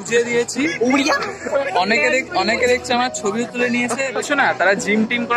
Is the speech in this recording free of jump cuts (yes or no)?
no